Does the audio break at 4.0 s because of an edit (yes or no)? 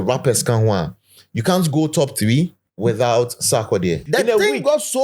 yes